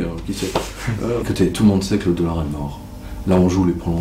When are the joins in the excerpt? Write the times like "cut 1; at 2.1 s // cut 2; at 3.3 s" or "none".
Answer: cut 1; at 1.2 s